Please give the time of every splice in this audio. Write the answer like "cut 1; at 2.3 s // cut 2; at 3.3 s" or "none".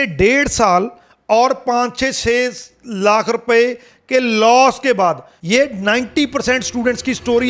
cut 1; at 5.3 s